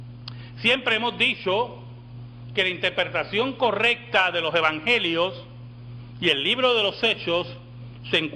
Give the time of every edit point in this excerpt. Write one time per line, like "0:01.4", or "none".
0:07.3

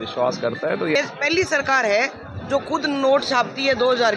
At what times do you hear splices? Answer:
0:00.9

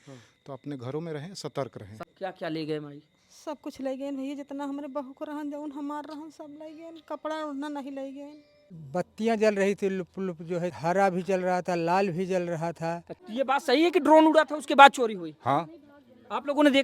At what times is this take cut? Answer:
0:02.0
0:08.7
0:10.8
0:13.1

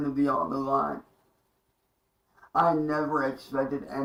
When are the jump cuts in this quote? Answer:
none

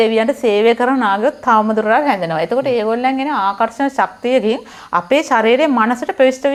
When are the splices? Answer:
none

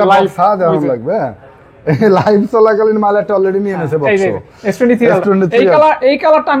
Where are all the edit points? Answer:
none

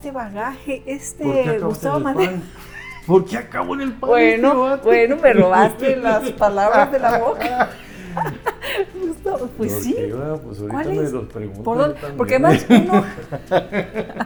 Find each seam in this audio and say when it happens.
none

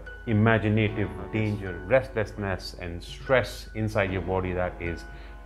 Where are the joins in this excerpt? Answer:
0:01.7

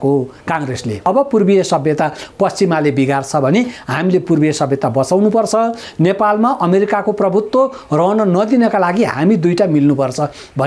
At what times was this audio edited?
0:01.1

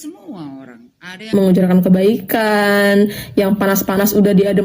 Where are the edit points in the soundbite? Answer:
0:01.3

